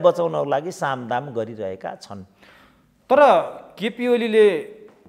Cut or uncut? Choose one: uncut